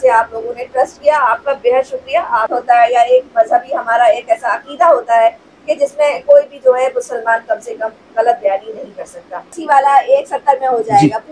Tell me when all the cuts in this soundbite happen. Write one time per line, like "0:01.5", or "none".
0:02.5
0:09.6